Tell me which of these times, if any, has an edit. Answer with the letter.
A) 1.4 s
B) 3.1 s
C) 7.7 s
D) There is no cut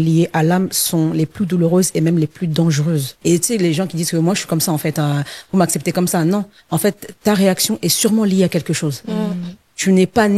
B